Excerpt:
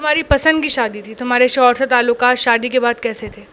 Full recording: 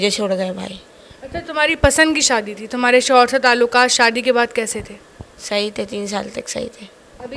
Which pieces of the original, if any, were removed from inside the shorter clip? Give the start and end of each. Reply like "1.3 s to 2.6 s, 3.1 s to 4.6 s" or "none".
none